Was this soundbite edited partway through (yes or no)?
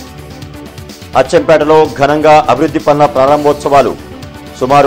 yes